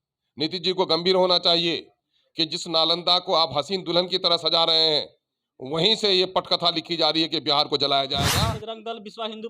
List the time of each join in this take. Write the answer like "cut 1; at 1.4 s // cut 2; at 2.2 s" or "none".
cut 1; at 8.4 s